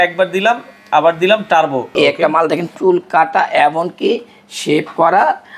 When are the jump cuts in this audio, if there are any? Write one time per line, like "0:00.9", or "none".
0:01.9